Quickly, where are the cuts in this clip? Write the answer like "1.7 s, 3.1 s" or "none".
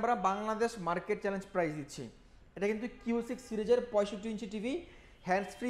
none